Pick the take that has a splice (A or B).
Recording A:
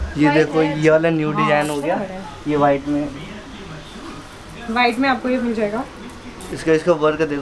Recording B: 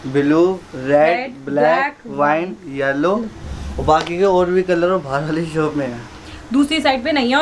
B